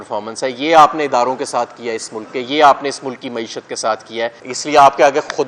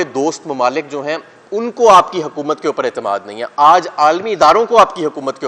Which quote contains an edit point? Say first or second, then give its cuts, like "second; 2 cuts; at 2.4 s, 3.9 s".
first; 1 cut; at 4.4 s